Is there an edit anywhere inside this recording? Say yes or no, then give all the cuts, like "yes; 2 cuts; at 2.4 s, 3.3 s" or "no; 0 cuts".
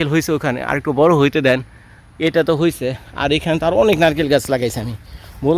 no; 0 cuts